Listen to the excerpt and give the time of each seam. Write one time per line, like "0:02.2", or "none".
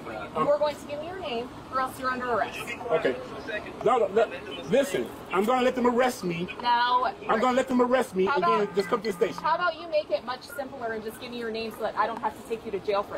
none